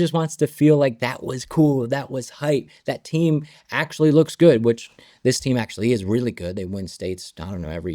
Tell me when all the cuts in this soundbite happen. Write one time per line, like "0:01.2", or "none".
none

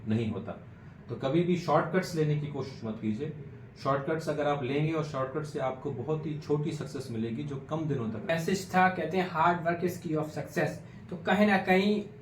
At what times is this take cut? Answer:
0:08.2

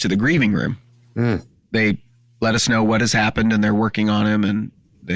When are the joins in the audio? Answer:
0:01.7

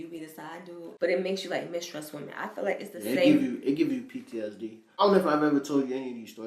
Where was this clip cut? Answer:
0:00.9
0:05.0

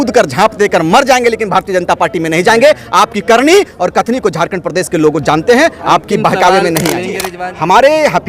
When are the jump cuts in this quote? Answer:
0:07.2

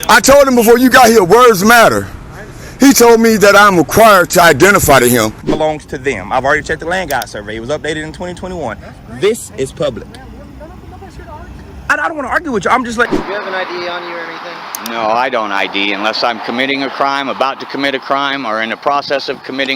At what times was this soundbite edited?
0:05.4
0:13.1

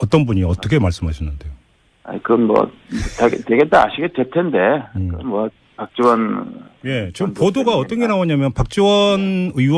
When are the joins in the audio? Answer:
none

